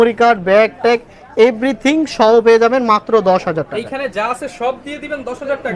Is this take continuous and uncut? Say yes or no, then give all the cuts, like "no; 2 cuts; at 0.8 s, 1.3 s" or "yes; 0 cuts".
yes; 0 cuts